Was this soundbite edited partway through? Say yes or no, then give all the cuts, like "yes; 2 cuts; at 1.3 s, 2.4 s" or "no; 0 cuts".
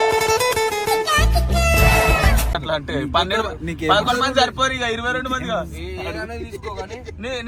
no; 0 cuts